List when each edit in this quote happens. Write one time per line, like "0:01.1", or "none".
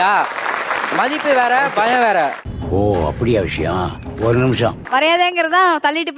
none